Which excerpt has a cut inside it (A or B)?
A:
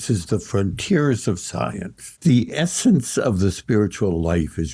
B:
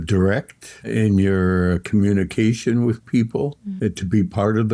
A